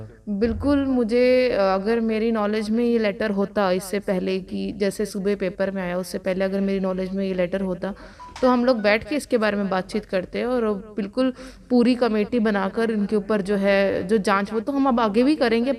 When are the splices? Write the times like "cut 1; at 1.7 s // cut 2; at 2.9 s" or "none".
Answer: none